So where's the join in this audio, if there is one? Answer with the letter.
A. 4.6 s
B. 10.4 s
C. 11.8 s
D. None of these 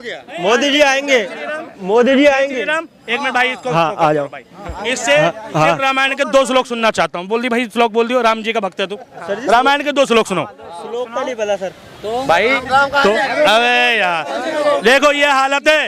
D